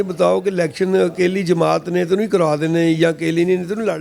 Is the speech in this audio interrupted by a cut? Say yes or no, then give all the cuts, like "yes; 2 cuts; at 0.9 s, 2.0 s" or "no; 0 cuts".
no; 0 cuts